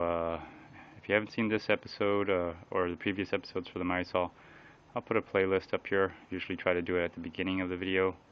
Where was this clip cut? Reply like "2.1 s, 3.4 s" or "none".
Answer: 1.3 s